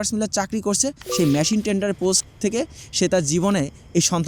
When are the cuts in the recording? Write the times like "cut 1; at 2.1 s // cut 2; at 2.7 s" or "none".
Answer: cut 1; at 1.0 s